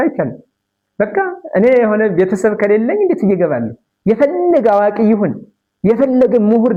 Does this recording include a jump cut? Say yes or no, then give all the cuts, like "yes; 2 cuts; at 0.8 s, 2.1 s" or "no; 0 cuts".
no; 0 cuts